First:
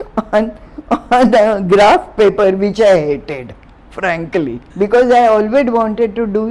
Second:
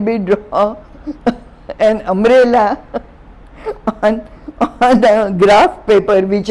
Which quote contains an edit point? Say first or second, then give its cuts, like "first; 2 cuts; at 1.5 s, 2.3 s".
first; 1 cut; at 4.6 s